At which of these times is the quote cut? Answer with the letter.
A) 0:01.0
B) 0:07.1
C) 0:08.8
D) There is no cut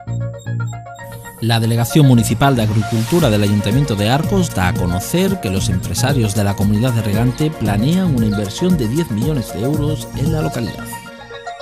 A